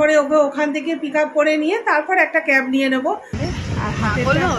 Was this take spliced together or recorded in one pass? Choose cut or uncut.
cut